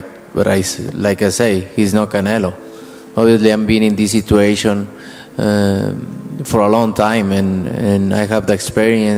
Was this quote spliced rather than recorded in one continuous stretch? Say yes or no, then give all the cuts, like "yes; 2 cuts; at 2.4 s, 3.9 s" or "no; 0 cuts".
no; 0 cuts